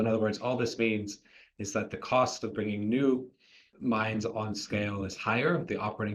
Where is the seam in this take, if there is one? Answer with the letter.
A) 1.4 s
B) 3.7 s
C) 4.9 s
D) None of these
B